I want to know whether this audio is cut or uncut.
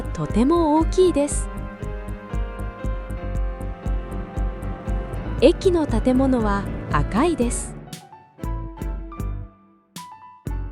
cut